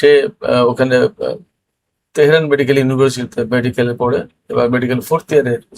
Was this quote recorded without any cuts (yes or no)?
yes